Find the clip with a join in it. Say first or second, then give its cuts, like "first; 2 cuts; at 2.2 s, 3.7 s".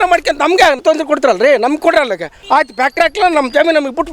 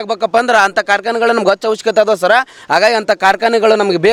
first; 2 cuts; at 0.8 s, 2.3 s